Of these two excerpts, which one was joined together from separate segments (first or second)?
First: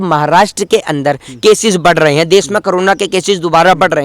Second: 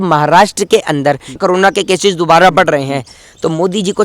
second